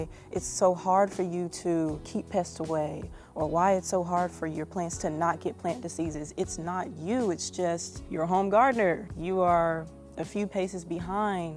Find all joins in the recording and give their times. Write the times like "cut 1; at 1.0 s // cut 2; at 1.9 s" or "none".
cut 1; at 8.0 s // cut 2; at 9.1 s